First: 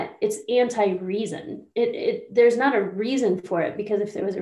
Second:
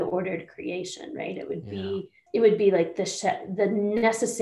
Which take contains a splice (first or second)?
second